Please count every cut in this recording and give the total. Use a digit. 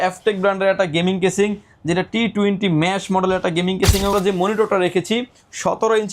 1